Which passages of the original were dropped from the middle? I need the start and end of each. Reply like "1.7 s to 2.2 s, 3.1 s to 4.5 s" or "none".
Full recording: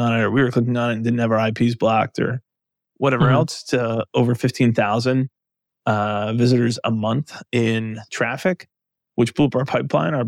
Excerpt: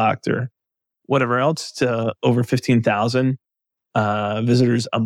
none